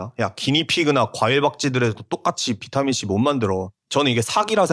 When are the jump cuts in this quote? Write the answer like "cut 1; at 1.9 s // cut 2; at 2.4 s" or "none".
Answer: cut 1; at 3.8 s